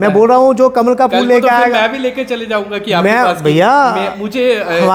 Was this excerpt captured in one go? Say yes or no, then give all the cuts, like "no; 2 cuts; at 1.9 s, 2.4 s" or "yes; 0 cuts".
yes; 0 cuts